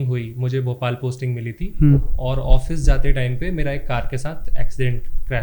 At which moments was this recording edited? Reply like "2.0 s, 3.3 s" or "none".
none

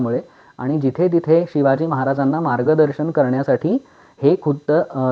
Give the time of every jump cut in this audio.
none

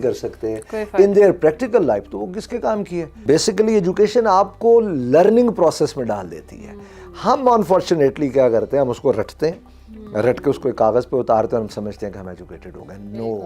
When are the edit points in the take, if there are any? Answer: 3.2 s

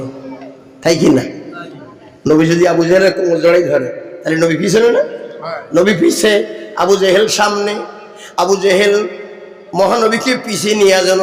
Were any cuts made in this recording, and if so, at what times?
none

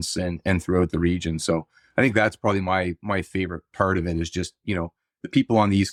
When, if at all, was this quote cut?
none

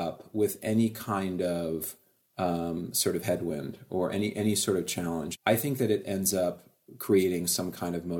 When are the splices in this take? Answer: 5.3 s

